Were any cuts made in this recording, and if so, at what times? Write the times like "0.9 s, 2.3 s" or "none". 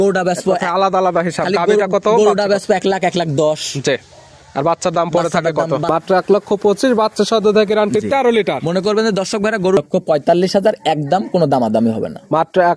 5.9 s, 9.8 s